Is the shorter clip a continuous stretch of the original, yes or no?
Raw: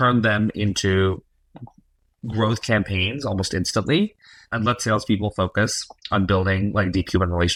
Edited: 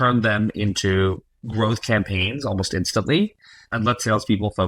no